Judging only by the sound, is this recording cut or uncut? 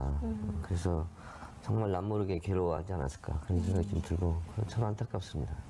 cut